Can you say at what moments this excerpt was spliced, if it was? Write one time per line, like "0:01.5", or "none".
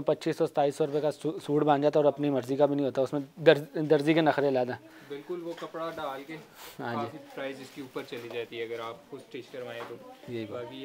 none